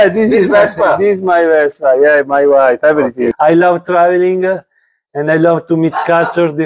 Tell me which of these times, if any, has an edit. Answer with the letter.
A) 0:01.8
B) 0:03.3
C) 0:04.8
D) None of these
B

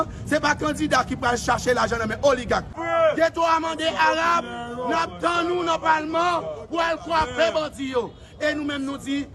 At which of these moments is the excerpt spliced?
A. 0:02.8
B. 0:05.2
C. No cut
A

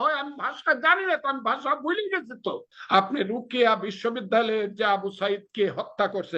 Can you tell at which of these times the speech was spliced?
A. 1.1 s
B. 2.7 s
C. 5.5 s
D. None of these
B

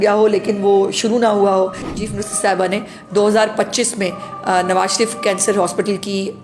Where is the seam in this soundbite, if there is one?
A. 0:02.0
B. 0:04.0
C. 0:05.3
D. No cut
A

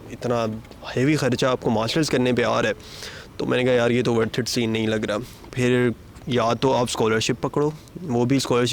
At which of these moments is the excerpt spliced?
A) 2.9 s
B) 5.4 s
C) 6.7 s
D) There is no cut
D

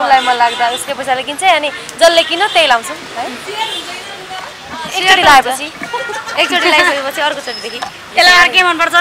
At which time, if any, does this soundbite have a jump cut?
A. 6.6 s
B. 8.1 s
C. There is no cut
B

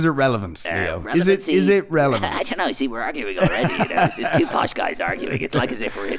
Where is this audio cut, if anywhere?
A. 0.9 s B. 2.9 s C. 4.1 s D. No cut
D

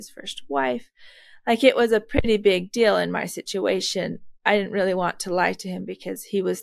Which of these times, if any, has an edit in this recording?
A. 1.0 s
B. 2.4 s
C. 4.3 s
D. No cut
D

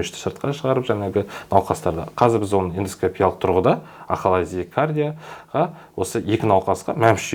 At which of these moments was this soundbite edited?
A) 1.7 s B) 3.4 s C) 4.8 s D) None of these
D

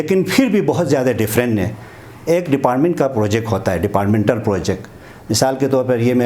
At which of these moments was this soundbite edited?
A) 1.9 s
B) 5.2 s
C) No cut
C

